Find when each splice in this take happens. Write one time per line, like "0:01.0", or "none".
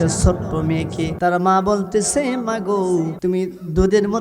0:01.1
0:03.1